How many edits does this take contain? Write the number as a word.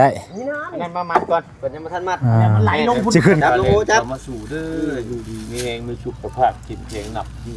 one